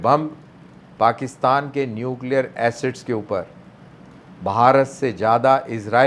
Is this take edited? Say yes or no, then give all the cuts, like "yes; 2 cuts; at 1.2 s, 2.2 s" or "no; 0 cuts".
no; 0 cuts